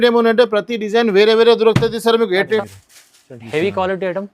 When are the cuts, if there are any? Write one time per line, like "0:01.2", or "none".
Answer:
0:02.6